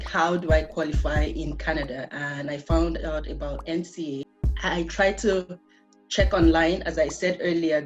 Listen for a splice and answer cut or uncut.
cut